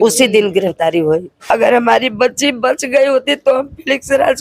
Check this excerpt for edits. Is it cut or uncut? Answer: cut